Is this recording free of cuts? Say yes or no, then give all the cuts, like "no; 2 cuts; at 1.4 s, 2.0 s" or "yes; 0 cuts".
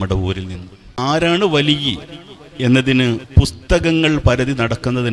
no; 1 cut; at 1.0 s